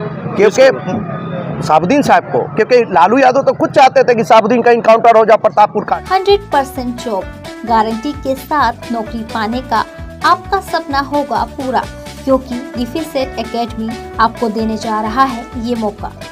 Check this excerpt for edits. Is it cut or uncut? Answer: uncut